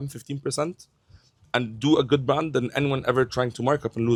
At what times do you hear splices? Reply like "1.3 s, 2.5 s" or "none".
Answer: none